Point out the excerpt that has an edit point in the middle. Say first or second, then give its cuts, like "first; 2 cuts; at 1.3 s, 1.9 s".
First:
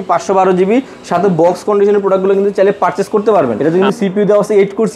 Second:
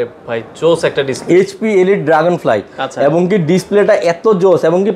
first; 1 cut; at 3.6 s